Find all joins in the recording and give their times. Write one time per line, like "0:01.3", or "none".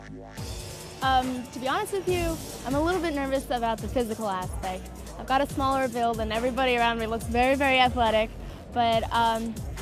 none